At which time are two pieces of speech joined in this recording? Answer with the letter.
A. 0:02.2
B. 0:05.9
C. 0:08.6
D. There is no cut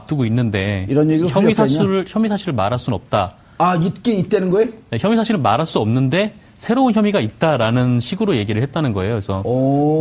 B